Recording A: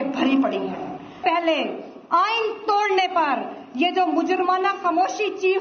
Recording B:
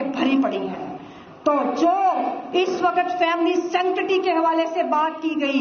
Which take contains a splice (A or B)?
A